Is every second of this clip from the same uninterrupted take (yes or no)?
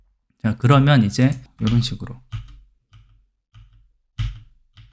no